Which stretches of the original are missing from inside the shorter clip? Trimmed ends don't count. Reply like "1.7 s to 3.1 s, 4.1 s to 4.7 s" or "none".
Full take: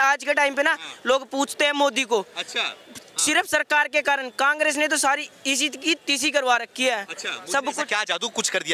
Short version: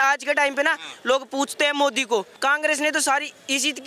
2.3 s to 4.3 s